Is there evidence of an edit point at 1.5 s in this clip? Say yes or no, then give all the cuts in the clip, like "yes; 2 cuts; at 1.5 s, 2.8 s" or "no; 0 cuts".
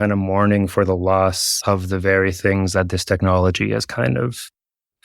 yes; 1 cut; at 1.5 s